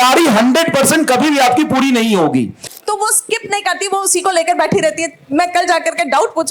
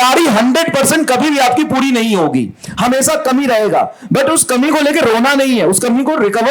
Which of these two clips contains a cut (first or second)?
first